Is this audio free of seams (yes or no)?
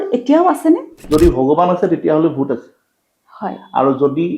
no